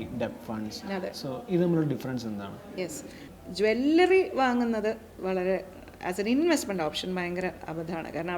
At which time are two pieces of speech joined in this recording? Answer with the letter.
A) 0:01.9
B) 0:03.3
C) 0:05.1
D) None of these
B